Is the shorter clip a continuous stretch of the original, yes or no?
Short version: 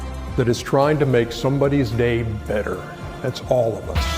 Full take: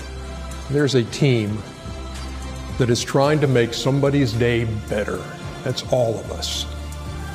yes